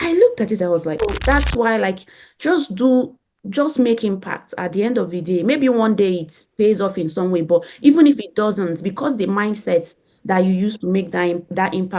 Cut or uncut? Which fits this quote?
cut